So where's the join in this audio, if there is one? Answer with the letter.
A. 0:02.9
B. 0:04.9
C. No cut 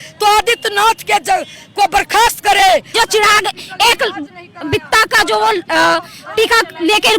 A